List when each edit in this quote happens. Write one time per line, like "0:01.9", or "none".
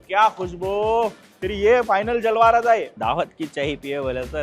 0:02.9